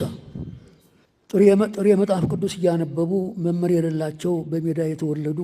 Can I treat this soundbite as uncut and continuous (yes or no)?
no